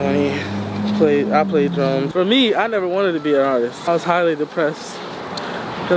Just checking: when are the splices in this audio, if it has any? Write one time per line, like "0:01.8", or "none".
0:02.1
0:03.8